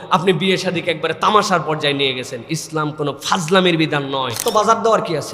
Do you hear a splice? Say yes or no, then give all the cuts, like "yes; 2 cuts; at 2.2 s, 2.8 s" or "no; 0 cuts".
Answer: yes; 1 cut; at 4.4 s